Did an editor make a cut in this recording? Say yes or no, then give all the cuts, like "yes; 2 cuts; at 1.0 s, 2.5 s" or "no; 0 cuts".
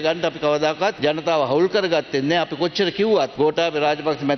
yes; 2 cuts; at 1.0 s, 3.3 s